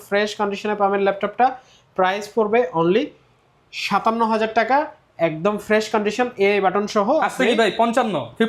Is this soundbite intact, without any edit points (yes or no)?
yes